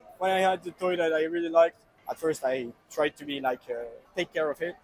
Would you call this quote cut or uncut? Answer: uncut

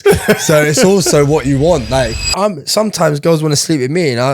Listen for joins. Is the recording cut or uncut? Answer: cut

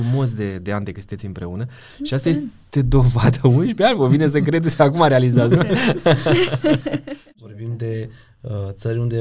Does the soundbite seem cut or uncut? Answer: cut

